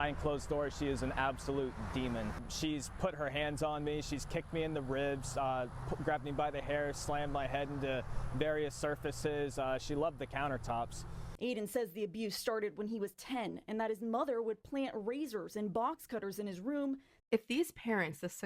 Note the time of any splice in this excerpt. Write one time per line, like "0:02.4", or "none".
0:02.5
0:11.2
0:17.1